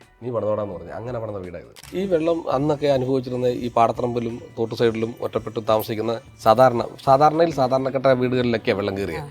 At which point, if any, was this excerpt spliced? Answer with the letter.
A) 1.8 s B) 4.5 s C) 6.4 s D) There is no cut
A